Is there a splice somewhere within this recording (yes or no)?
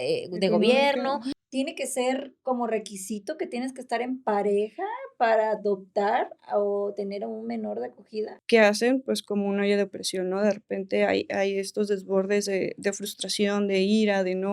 yes